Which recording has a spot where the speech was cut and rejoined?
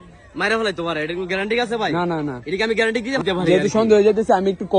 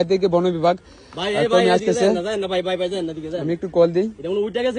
first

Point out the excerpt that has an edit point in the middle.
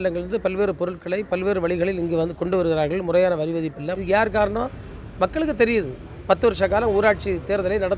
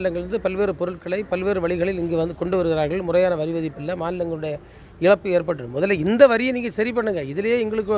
first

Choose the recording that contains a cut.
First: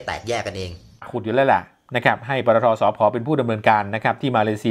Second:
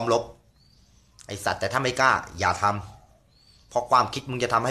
first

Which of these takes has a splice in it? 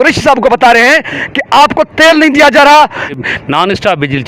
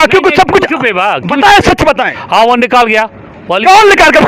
first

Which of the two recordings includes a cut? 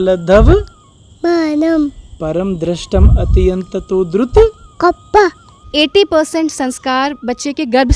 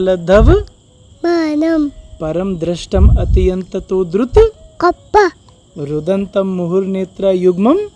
first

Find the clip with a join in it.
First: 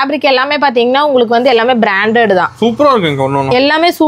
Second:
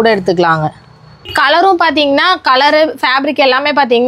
second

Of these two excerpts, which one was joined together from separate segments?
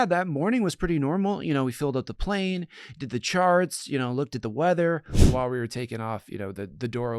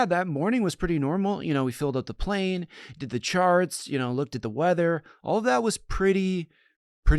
first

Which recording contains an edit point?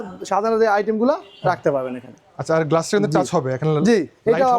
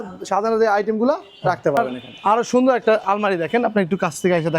second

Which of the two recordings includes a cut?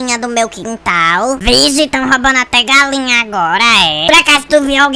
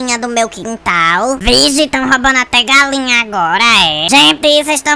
second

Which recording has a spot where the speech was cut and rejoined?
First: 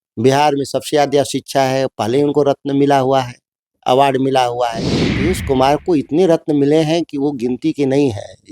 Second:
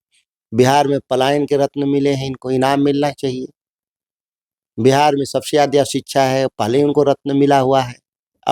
first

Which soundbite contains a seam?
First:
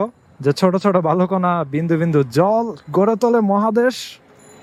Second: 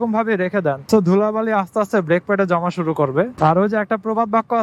second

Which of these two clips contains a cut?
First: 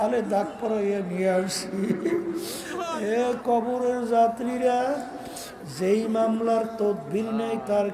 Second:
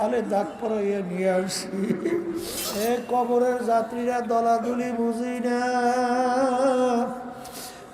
second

